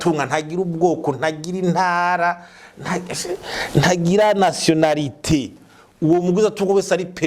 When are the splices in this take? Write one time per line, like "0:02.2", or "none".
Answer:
none